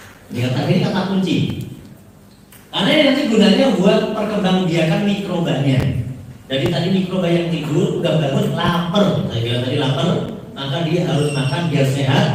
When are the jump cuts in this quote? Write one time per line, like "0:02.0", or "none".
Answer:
none